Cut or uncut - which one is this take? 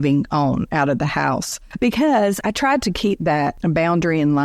cut